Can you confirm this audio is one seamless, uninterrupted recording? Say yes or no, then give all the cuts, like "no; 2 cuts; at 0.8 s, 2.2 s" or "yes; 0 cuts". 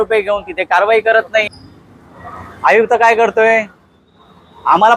no; 1 cut; at 1.5 s